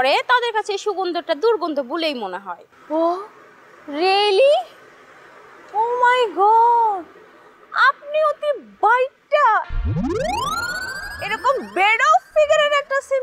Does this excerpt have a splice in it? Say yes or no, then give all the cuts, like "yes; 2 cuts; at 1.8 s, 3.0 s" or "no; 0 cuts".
no; 0 cuts